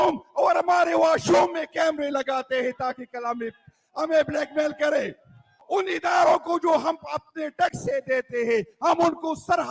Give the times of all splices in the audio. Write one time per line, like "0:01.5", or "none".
0:05.6

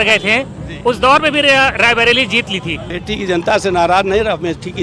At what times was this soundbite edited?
0:02.9

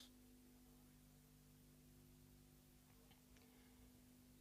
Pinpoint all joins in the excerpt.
none

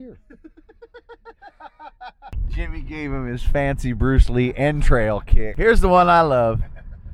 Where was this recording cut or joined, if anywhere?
0:02.4
0:05.4

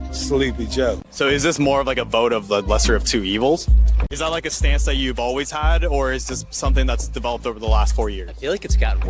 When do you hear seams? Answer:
0:01.0
0:03.9

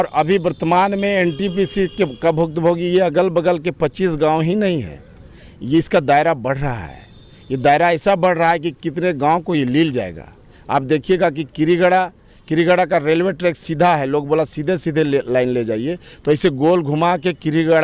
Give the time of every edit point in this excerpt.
none

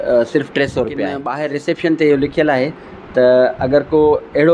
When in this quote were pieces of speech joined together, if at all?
0:01.3

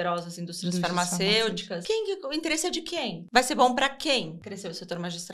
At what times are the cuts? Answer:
0:01.7
0:03.2
0:04.4

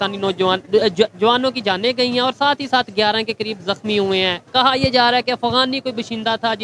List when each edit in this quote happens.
none

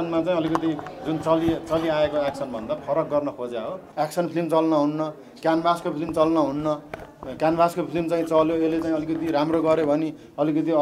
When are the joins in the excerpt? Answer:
0:03.8

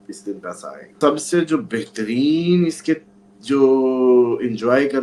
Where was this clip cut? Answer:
0:00.9

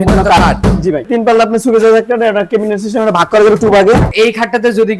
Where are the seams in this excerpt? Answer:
0:01.0
0:04.1

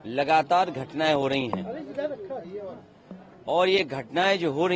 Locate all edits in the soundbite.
none

